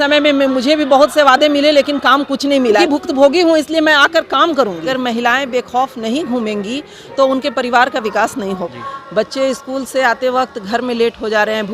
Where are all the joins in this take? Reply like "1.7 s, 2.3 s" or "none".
2.8 s, 4.9 s, 8.6 s

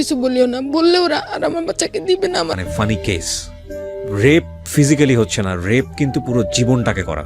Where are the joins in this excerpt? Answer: 2.5 s

